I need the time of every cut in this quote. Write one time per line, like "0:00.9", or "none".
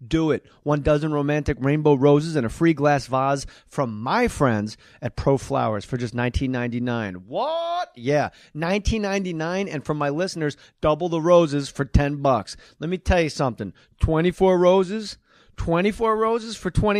none